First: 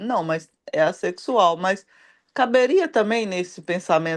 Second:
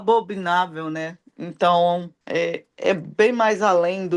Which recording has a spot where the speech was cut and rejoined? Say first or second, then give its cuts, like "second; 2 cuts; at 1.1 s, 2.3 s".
second; 1 cut; at 2.2 s